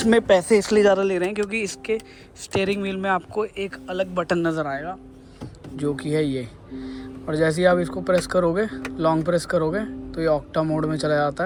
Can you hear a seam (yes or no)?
no